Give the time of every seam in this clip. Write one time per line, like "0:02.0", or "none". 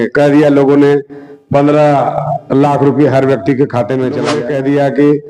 0:04.3